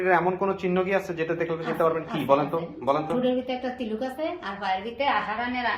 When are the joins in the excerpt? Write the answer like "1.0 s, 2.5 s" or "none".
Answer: none